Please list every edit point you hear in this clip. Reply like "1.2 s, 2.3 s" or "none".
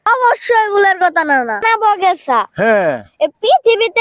1.6 s